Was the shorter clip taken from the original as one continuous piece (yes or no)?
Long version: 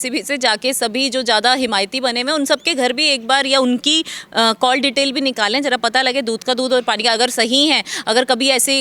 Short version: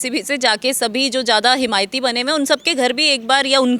yes